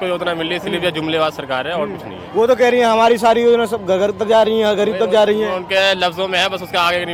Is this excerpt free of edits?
yes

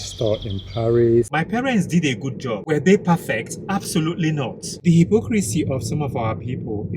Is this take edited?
yes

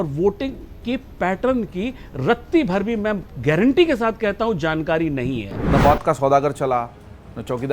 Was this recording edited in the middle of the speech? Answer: yes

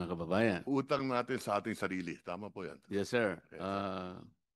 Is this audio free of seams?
yes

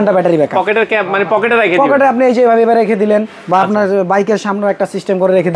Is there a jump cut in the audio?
no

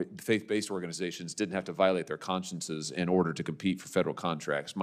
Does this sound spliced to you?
no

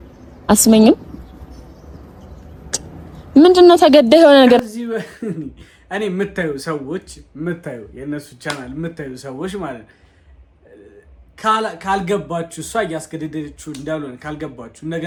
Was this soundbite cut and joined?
no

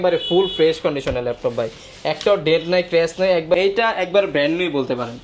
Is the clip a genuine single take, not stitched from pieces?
no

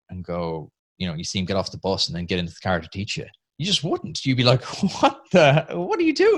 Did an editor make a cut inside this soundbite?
no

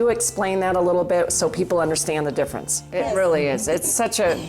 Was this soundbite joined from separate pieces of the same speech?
yes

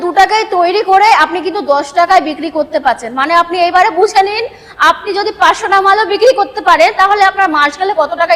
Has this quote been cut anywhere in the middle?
no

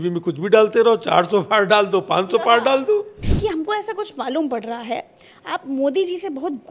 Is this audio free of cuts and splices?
no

